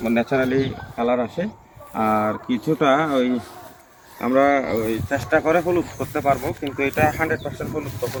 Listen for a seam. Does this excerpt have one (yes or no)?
no